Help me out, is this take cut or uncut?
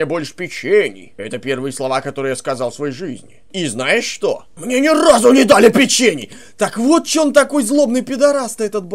cut